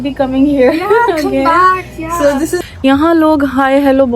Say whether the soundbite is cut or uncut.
cut